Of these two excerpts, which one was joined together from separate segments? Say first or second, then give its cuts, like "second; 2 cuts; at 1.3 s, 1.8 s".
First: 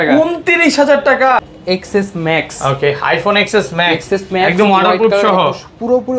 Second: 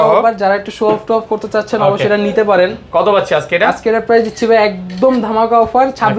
first; 1 cut; at 1.4 s